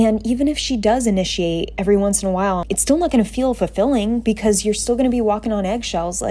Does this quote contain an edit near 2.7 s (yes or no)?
yes